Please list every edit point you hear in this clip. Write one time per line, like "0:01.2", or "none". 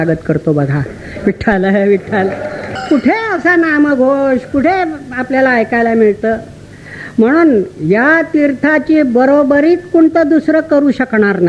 0:02.7